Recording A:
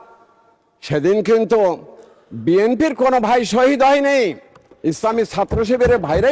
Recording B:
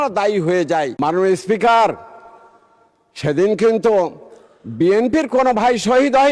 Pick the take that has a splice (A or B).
B